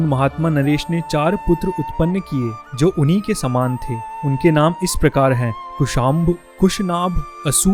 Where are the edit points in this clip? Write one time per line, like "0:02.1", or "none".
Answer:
none

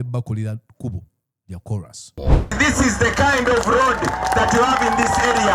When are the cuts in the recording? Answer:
0:02.3

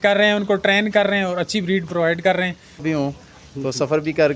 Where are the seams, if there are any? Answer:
0:02.8

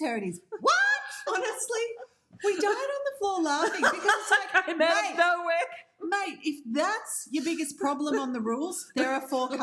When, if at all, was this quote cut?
0:01.1

